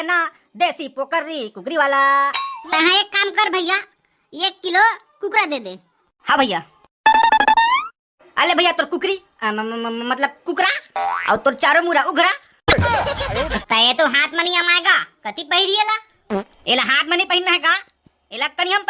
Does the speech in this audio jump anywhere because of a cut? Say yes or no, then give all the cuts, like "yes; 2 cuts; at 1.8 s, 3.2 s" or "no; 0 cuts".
yes; 2 cuts; at 2.6 s, 13.6 s